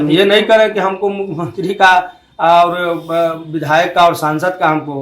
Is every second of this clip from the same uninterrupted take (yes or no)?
yes